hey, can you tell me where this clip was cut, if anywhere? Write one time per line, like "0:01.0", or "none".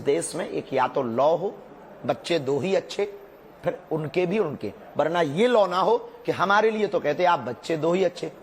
0:02.7